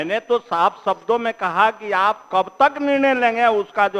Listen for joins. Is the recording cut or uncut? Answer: uncut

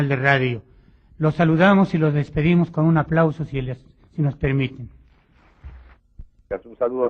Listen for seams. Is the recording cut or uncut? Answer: cut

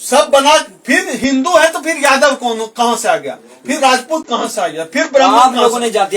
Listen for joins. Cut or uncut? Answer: uncut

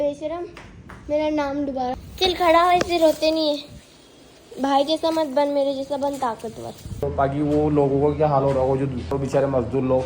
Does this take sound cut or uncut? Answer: cut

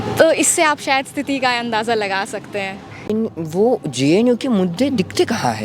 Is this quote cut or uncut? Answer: cut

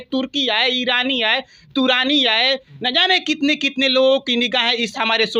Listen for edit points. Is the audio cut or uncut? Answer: uncut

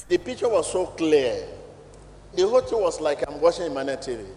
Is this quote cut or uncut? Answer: cut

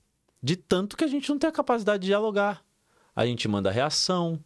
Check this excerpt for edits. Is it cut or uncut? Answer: uncut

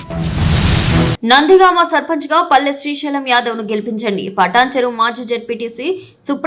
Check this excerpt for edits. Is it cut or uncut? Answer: cut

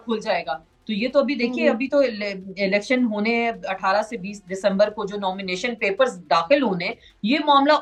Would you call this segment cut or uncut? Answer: uncut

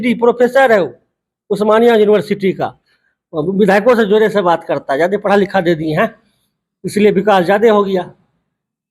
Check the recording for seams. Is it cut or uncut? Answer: uncut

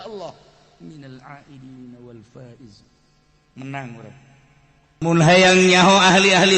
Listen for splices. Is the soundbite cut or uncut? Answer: cut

